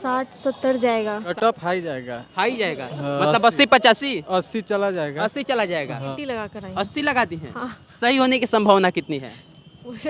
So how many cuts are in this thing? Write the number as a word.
two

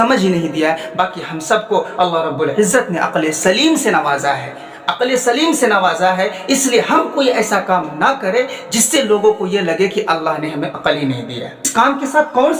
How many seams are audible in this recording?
one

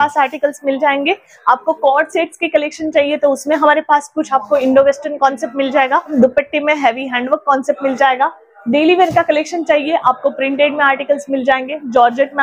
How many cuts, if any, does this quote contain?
one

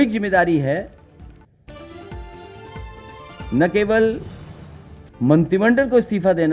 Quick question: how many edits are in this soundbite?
zero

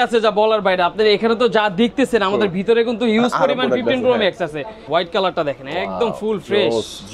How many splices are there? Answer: one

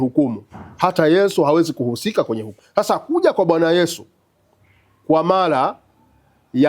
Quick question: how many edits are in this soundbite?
one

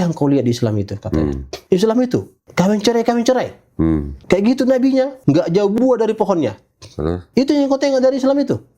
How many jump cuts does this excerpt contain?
five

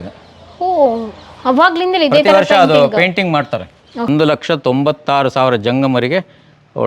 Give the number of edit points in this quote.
one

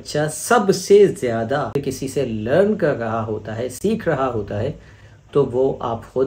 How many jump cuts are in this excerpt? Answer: one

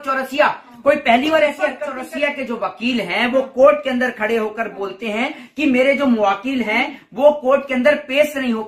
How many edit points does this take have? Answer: one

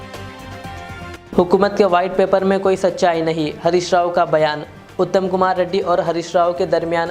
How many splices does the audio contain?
one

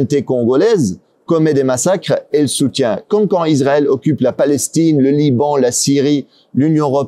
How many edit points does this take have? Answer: zero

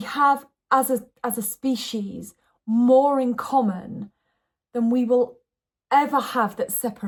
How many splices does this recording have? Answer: zero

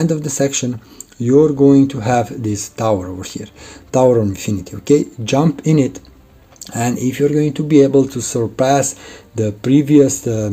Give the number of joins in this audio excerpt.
zero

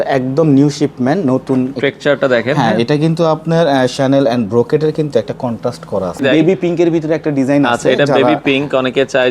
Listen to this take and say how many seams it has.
two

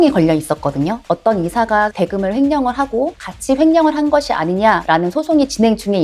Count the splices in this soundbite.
two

